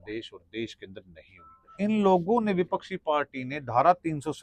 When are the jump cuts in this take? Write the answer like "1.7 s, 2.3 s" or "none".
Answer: 1.7 s